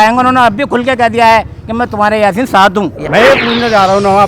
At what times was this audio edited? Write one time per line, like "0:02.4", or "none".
0:03.0